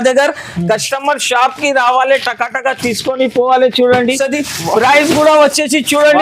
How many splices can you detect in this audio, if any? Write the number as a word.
one